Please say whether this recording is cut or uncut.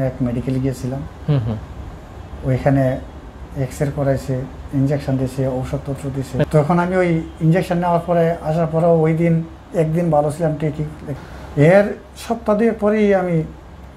cut